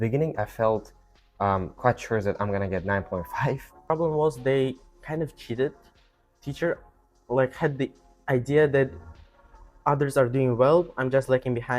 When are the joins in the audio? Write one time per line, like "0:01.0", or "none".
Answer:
0:03.8
0:05.9